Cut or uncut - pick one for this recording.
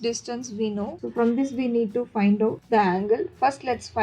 cut